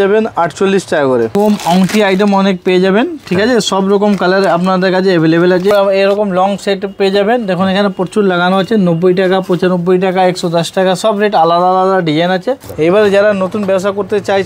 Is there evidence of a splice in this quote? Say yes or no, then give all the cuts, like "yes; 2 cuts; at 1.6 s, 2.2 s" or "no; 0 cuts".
yes; 3 cuts; at 1.3 s, 5.7 s, 12.7 s